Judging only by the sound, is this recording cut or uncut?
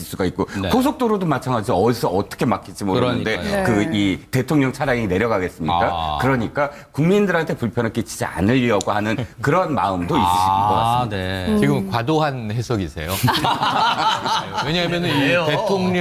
uncut